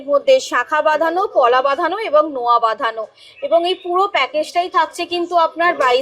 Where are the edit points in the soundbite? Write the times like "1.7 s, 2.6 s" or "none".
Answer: none